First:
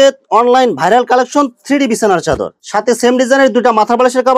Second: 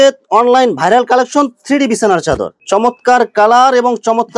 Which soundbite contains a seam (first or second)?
second